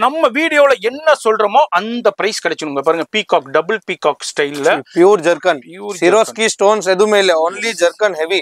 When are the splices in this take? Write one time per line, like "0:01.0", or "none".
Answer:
none